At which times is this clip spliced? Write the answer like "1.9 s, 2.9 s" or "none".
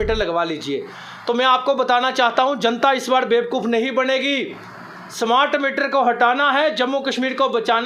none